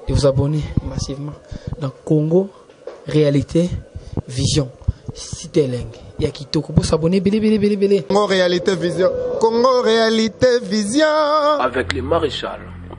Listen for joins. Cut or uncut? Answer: uncut